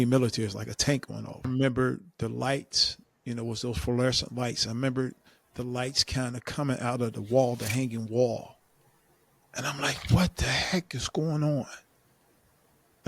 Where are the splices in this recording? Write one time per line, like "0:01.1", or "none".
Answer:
0:01.5